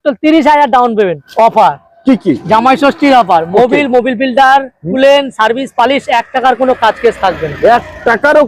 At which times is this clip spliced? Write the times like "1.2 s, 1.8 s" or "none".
1.2 s